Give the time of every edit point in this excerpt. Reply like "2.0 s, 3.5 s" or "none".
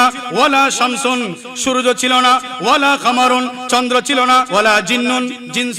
4.5 s